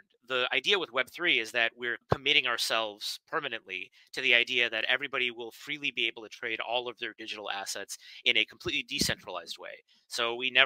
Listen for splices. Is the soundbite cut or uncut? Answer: uncut